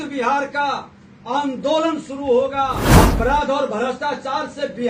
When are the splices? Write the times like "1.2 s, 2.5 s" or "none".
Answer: 2.8 s